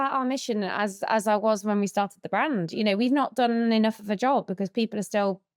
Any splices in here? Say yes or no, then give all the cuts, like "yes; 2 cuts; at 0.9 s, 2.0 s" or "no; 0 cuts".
no; 0 cuts